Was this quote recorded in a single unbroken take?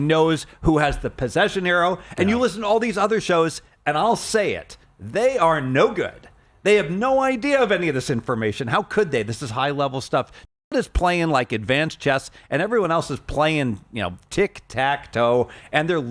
yes; 0 cuts

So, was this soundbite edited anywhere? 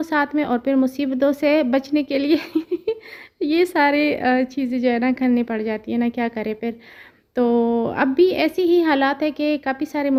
no; 0 cuts

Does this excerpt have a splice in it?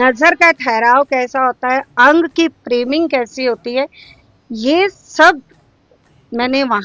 no; 0 cuts

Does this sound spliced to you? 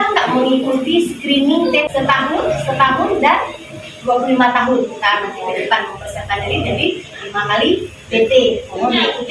yes; 1 cut; at 1.9 s

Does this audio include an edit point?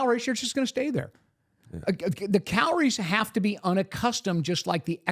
no; 0 cuts

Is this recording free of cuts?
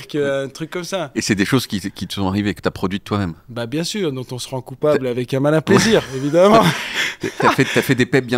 yes; 0 cuts

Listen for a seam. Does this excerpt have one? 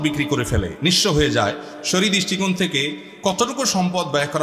no; 0 cuts

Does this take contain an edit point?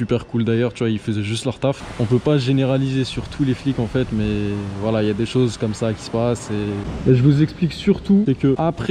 no; 0 cuts

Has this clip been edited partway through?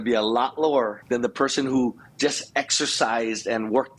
yes; 1 cut; at 1.0 s

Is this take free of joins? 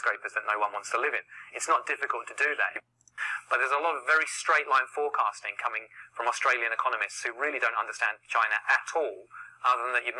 no; 1 cut; at 3.0 s

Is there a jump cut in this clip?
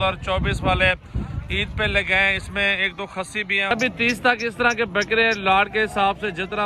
yes; 1 cut; at 3.7 s

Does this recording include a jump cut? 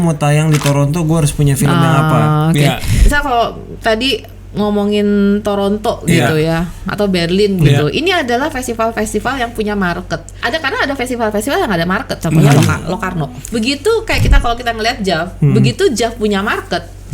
yes; 3 cuts; at 3.0 s, 10.3 s, 13.4 s

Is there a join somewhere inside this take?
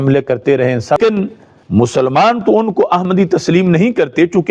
yes; 1 cut; at 1.0 s

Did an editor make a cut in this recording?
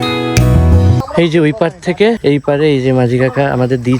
yes; 2 cuts; at 1.0 s, 2.2 s

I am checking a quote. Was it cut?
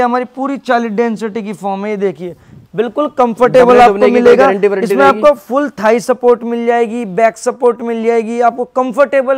no; 0 cuts

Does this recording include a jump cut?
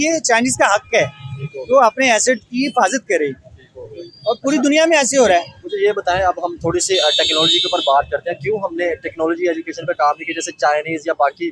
no; 0 cuts

